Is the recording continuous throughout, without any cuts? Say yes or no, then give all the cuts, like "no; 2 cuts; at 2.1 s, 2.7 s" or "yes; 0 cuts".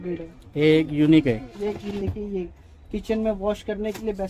no; 1 cut; at 1.9 s